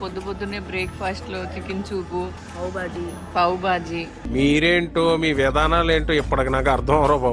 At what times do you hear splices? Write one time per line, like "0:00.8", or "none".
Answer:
none